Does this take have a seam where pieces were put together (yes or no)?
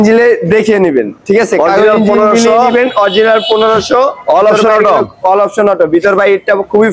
no